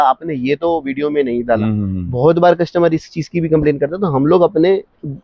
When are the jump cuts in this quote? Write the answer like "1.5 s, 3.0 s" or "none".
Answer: none